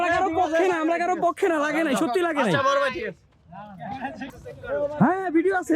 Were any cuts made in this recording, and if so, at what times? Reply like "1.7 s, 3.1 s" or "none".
none